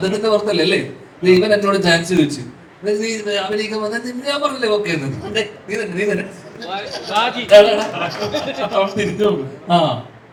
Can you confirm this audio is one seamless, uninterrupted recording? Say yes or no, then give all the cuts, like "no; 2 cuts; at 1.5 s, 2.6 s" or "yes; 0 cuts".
yes; 0 cuts